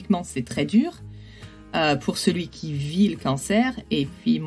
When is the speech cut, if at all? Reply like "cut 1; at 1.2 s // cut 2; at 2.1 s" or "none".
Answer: none